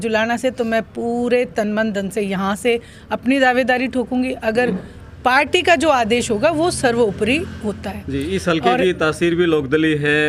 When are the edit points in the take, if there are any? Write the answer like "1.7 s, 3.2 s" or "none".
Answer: none